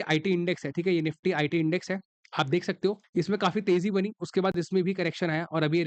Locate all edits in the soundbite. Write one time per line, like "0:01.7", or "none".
0:03.0